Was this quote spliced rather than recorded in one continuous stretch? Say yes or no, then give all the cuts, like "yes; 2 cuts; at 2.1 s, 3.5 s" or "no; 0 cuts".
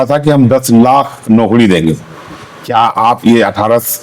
no; 0 cuts